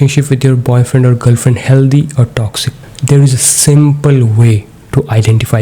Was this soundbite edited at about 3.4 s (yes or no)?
yes